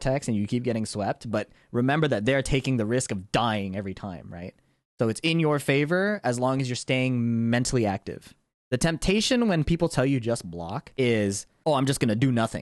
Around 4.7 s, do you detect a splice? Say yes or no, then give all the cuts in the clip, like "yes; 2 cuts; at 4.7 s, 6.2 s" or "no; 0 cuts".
no; 2 cuts; at 10.8 s, 11.5 s